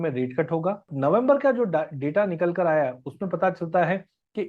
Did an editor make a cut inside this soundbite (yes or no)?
yes